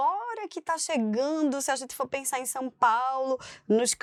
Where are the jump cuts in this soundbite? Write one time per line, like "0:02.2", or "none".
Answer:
none

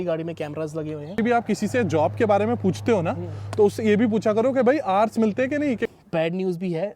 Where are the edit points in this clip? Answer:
0:01.2
0:05.9

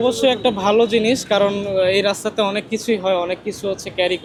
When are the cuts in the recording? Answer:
none

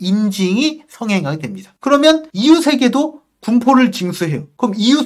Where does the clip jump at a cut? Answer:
none

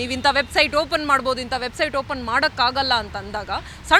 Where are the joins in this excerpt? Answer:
none

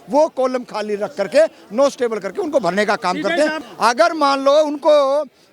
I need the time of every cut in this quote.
0:03.6

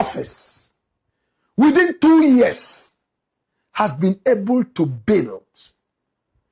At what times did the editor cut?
none

